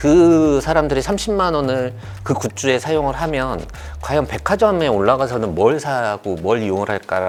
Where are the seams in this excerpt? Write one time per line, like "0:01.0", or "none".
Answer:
none